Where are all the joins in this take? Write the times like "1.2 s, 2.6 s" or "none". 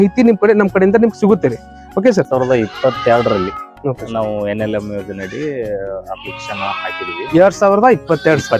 2.3 s